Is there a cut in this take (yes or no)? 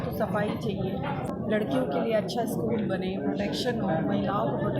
yes